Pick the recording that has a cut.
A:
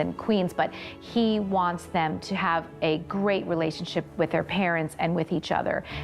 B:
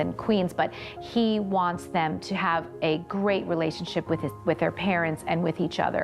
A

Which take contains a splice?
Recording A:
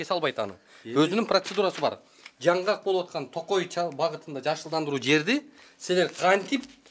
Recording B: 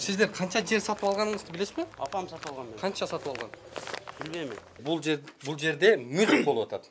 B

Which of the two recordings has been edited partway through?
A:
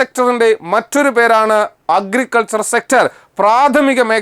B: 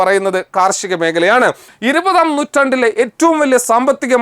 B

